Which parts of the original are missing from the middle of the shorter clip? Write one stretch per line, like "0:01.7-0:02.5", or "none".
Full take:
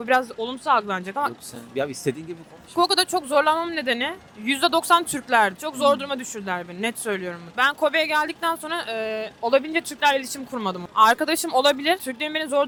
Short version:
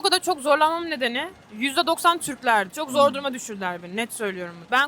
none